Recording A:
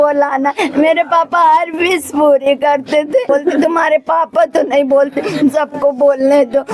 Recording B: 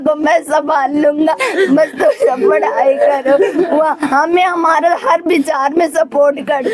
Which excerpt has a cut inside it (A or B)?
A